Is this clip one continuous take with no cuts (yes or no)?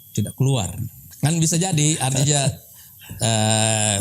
no